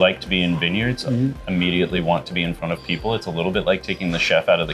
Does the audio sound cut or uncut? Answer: uncut